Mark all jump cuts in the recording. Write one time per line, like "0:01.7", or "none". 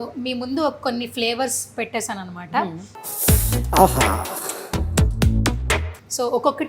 none